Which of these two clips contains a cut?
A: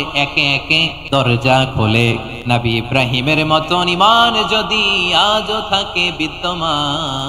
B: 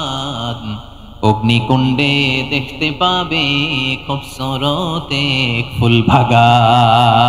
A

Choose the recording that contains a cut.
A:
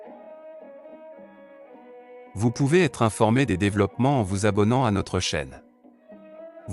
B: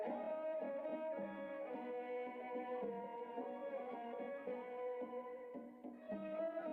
A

